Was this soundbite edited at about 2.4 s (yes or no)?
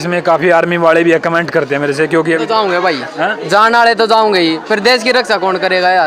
yes